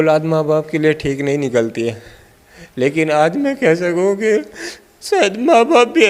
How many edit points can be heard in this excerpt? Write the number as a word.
zero